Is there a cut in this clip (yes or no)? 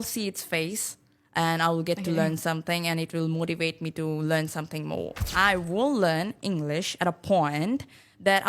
yes